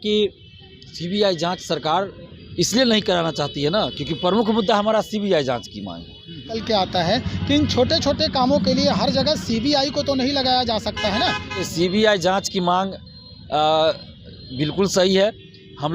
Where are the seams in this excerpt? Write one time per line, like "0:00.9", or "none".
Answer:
0:06.5
0:11.7

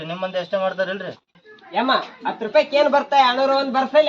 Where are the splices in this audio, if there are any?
0:01.5

